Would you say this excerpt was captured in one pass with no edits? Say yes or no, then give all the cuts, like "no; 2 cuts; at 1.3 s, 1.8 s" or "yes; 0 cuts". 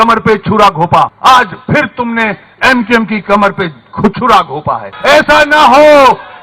no; 2 cuts; at 1.1 s, 4.9 s